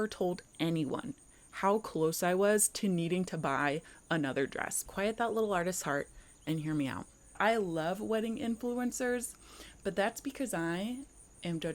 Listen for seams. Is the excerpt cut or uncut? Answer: cut